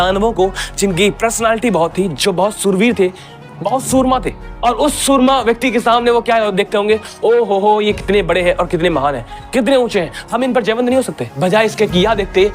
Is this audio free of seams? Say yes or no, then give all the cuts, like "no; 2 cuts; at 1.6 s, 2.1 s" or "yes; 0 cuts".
no; 2 cuts; at 4.4 s, 11.2 s